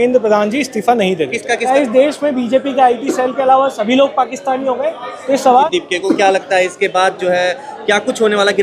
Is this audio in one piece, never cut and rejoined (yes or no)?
no